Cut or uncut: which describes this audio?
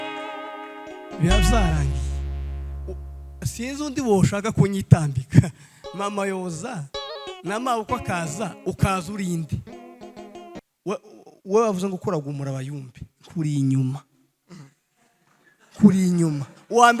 cut